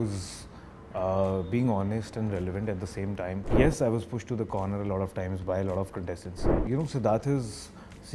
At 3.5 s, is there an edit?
yes; 2 cuts; at 3.5 s, 6.5 s

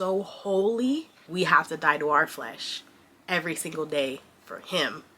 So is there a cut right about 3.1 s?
no; 1 cut; at 1.2 s

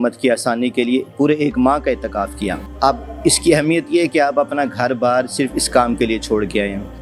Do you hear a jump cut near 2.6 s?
yes; 1 cut; at 2.6 s

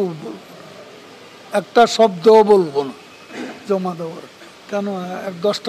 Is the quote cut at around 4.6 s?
yes; 1 cut; at 4.6 s

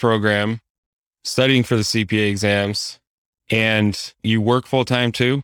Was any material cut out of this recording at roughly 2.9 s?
no; 1 cut; at 4.2 s

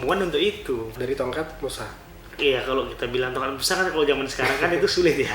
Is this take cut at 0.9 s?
yes; 1 cut; at 0.9 s

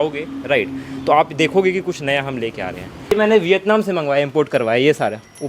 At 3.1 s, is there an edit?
yes; 1 cut; at 3.1 s

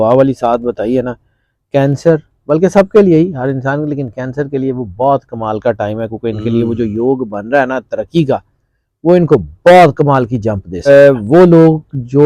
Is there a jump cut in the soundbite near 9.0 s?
no; 1 cut; at 10.9 s

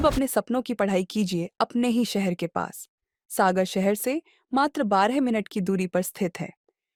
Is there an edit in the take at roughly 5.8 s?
no; 0 cuts

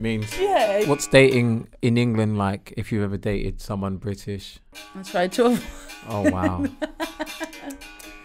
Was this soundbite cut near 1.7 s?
yes; 3 cuts; at 0.9 s, 1.7 s, 5.1 s

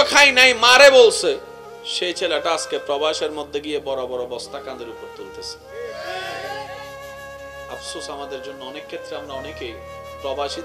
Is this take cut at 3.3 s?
no; 2 cuts; at 6.7 s, 7.9 s

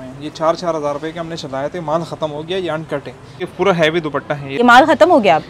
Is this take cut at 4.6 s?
yes; 2 cuts; at 3.5 s, 4.6 s

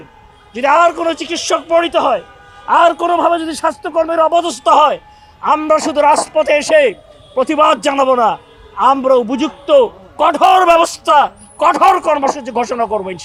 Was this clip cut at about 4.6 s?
no; 0 cuts

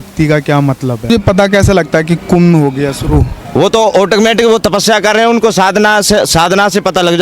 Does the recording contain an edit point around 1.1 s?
yes; 1 cut; at 1.1 s

